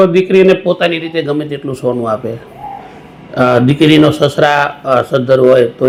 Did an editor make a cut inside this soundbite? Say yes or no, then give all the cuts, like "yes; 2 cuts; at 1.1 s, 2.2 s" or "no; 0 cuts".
no; 0 cuts